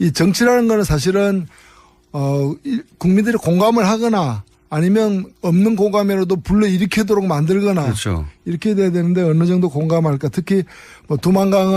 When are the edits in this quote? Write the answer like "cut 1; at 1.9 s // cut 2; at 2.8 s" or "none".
cut 1; at 6.7 s